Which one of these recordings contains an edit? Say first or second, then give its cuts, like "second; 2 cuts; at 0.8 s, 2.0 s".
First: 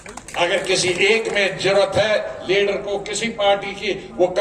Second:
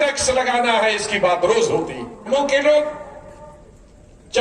second; 1 cut; at 2.3 s